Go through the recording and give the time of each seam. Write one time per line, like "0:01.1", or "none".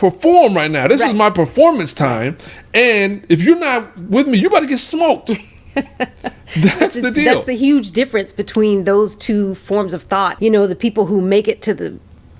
0:10.3